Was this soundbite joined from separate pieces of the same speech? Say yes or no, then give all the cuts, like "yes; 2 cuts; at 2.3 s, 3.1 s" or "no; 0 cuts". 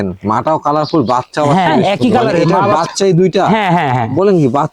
yes; 1 cut; at 2.8 s